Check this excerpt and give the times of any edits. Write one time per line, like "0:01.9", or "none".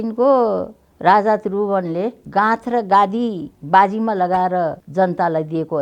0:02.2
0:03.5
0:04.8